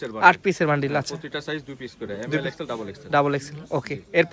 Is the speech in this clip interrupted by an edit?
no; 0 cuts

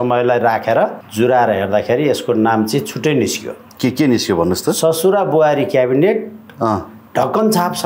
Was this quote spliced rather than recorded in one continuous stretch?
yes; 1 cut; at 1.0 s

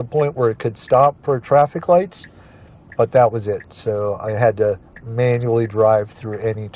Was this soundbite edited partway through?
no; 0 cuts

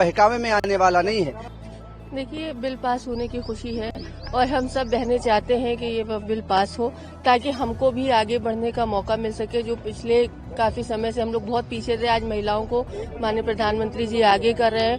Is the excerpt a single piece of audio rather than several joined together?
no; 1 cut; at 1.4 s

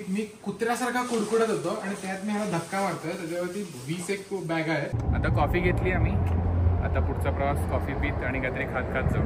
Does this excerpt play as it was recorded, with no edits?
no; 1 cut; at 5.0 s

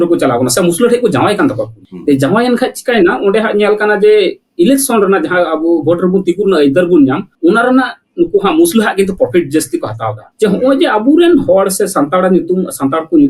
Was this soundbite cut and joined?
no; 0 cuts

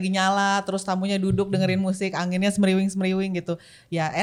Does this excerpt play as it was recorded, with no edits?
yes; 0 cuts

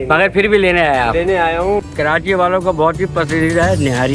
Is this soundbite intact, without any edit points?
no; 1 cut; at 1.8 s

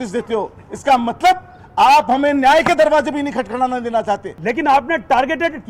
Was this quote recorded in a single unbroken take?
no; 1 cut; at 4.3 s

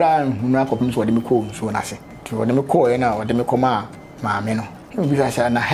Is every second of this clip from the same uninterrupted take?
no; 2 cuts; at 2.1 s, 4.8 s

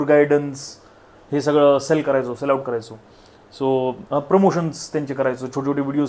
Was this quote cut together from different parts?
no; 0 cuts

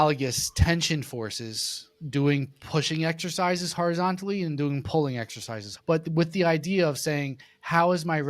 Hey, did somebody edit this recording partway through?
yes; 1 cut; at 5.6 s

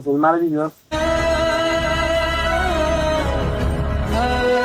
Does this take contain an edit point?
yes; 1 cut; at 0.9 s

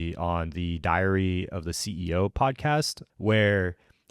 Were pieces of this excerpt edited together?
yes; 1 cut; at 3.0 s

